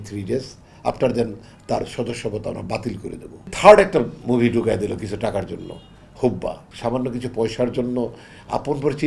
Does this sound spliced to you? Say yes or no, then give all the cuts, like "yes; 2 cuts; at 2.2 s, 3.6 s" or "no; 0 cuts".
yes; 2 cuts; at 3.5 s, 6.7 s